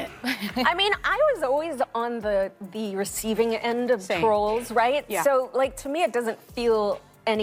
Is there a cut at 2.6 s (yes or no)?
no